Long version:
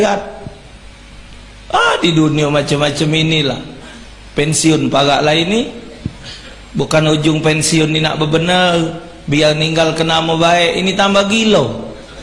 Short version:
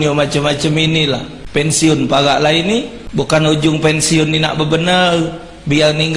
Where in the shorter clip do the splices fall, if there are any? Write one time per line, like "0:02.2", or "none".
0:01.4
0:03.0